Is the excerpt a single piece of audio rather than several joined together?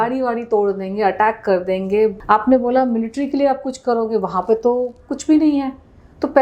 no; 1 cut; at 2.2 s

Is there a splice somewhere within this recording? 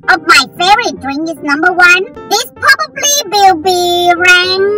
no; 0 cuts

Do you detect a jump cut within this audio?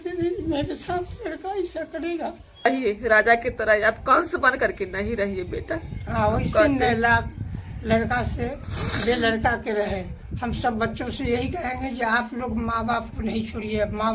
yes; 1 cut; at 2.7 s

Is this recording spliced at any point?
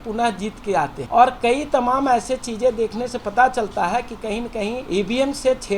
yes; 2 cuts; at 1.0 s, 4.8 s

